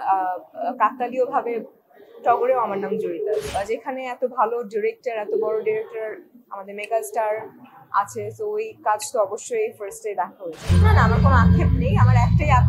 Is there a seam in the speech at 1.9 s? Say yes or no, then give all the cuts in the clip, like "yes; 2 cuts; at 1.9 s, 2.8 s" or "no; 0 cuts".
no; 2 cuts; at 3.5 s, 10.5 s